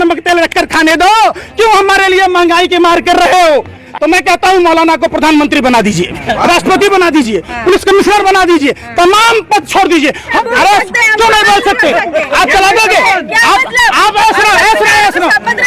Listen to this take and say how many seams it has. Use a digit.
2